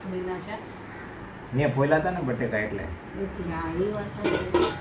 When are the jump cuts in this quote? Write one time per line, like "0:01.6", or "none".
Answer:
none